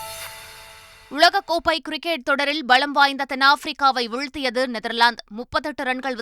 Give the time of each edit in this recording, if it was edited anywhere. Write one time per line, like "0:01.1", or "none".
0:00.9